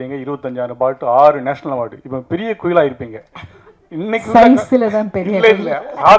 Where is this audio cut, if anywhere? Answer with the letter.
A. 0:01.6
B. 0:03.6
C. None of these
C